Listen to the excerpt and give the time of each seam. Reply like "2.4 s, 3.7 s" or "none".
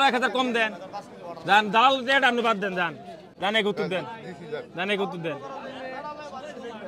none

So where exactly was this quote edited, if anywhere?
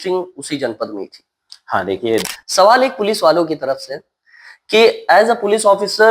2.2 s

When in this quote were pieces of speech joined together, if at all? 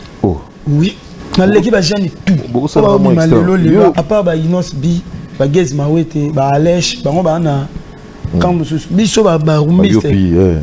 1.1 s, 3.9 s

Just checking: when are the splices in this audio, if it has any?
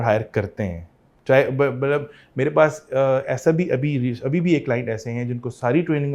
none

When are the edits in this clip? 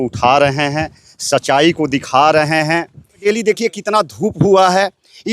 3.2 s

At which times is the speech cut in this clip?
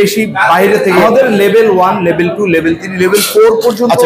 1.0 s

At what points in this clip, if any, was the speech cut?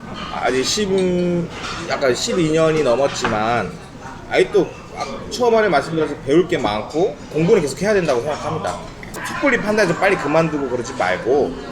9.2 s

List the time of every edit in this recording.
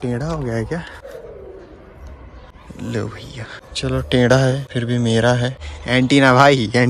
1.0 s, 2.5 s, 3.6 s, 4.7 s, 5.7 s

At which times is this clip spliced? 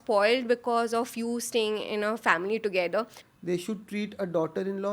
3.2 s

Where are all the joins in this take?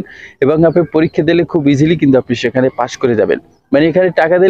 none

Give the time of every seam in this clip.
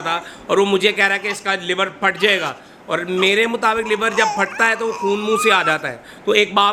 none

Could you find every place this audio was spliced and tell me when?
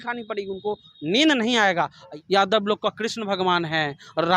2.0 s

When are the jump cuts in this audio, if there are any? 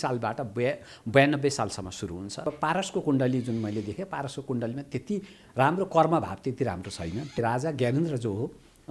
2.5 s, 7.4 s

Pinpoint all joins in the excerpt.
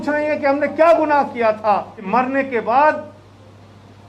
2.1 s

